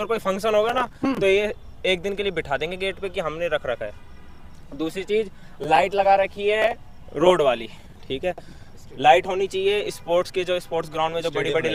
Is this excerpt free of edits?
yes; 0 cuts

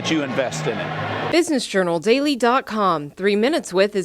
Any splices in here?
yes; 1 cut; at 1.3 s

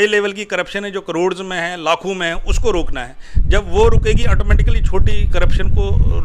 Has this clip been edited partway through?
no; 0 cuts

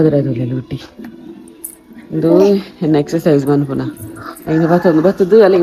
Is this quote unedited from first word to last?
yes; 0 cuts

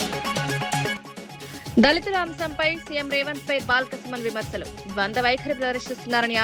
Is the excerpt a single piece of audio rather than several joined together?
no; 1 cut; at 1.0 s

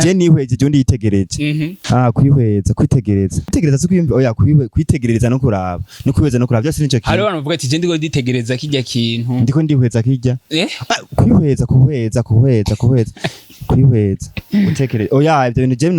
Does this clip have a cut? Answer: yes; 2 cuts; at 1.8 s, 3.5 s

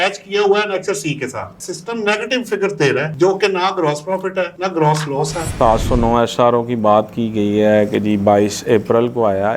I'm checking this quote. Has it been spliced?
yes; 2 cuts; at 1.5 s, 5.5 s

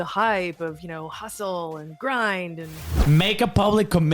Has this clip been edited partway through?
yes; 1 cut; at 3.0 s

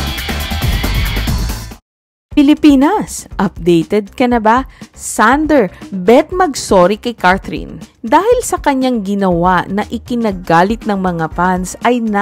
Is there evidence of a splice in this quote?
yes; 1 cut; at 1.7 s

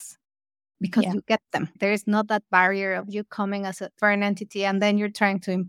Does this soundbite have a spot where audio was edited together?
yes; 2 cuts; at 1.7 s, 3.9 s

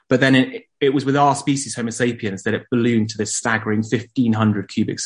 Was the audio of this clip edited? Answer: no; 0 cuts

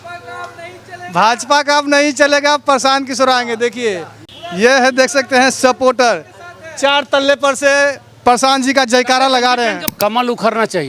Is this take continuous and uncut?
no; 1 cut; at 9.8 s

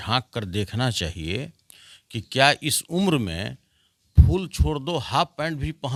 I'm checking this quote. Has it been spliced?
no; 0 cuts

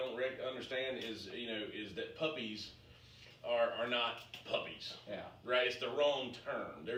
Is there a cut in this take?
no; 0 cuts

